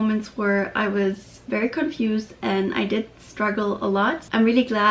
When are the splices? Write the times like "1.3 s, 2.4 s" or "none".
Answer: none